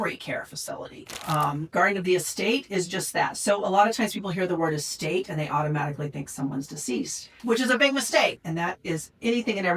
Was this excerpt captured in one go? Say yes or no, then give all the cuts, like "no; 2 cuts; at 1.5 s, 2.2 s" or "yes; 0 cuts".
no; 3 cuts; at 1.1 s, 7.3 s, 8.4 s